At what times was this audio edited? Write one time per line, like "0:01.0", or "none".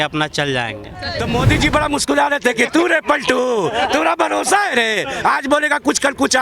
0:01.2

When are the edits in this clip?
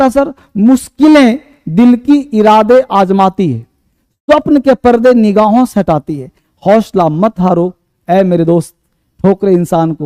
none

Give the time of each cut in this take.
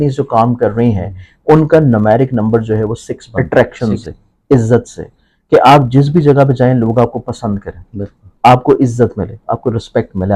0:03.3

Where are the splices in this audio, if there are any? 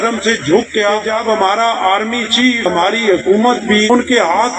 0:01.1
0:02.7
0:03.9

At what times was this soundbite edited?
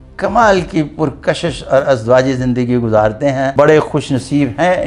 0:03.5

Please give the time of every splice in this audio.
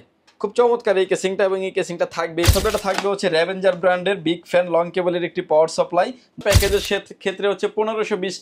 0:02.5
0:06.4

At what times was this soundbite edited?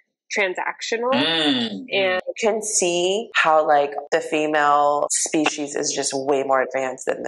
0:02.2
0:03.3
0:04.0
0:05.2

